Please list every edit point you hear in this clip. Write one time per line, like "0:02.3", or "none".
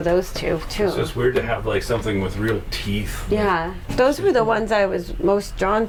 none